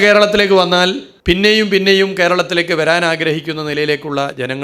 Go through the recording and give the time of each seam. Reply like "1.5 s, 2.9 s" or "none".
1.1 s